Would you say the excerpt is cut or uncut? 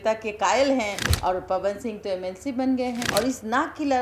cut